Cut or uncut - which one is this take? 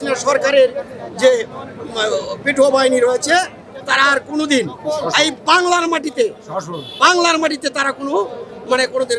uncut